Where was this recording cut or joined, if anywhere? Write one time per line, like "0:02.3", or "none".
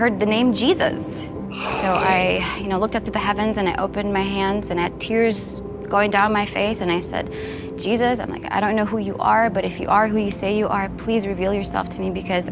none